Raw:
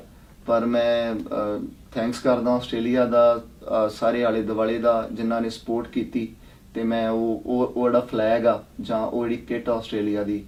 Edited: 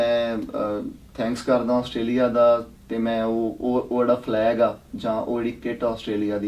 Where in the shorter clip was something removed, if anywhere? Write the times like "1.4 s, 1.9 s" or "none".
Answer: 2.8 s

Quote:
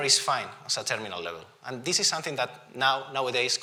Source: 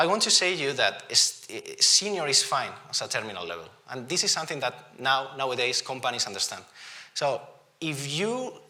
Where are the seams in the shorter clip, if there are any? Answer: none

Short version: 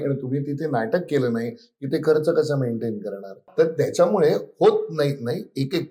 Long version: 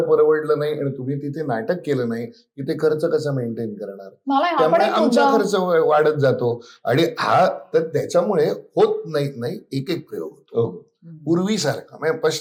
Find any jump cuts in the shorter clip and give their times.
3.4 s

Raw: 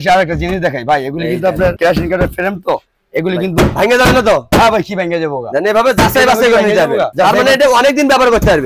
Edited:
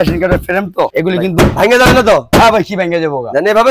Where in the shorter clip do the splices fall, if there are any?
0.9 s

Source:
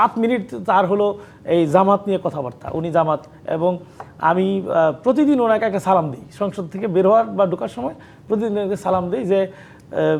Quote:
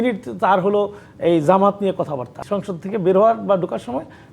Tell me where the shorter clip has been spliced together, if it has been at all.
2.3 s

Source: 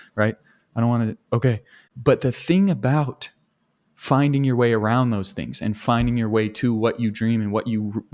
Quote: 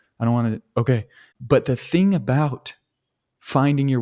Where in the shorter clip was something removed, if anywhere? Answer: none

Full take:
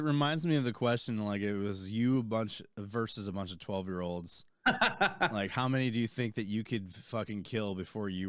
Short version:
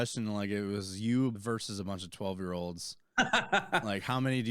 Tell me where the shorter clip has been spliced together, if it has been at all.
1.4 s

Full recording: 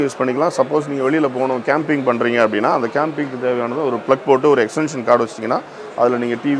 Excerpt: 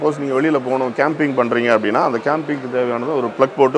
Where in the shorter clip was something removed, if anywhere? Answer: none

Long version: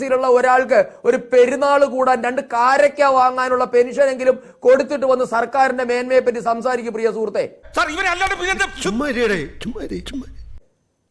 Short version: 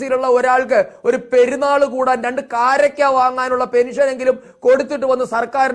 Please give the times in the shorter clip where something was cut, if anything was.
none

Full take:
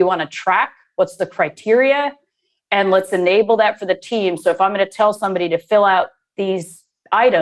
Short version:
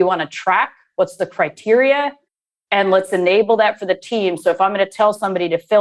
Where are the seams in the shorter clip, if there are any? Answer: none

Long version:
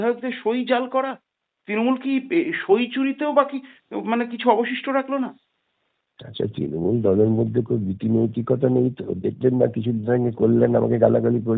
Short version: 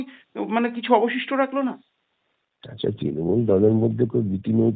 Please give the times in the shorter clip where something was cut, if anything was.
none

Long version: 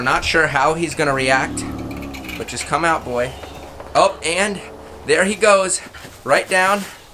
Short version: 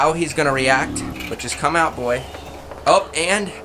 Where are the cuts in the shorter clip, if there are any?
1.1 s

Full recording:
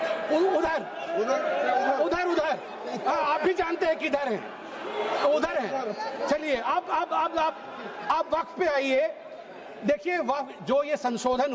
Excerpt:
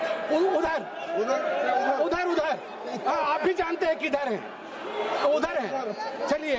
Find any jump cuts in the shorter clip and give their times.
none

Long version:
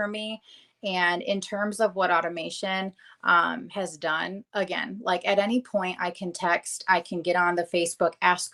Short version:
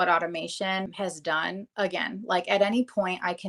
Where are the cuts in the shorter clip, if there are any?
0.9 s

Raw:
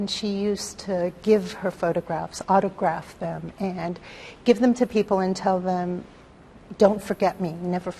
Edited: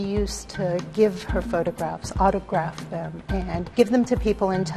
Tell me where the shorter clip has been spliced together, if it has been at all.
3.7 s

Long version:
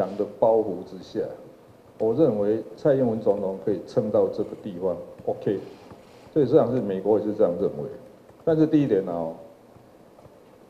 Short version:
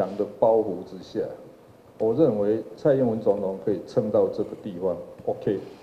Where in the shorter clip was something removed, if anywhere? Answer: none

